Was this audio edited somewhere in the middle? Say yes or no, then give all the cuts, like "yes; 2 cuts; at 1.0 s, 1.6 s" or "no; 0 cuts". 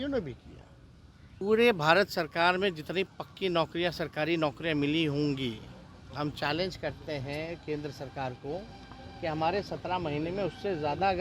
yes; 1 cut; at 1.4 s